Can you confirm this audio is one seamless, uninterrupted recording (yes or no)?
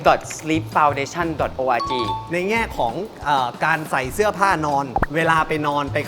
no